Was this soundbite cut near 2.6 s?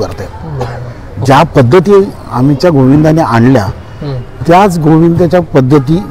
no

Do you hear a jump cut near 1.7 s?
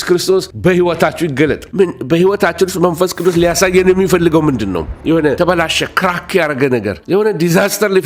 yes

